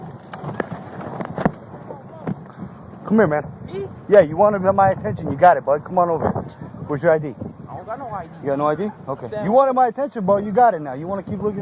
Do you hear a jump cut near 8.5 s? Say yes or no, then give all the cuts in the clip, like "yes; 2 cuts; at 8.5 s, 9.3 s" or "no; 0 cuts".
no; 0 cuts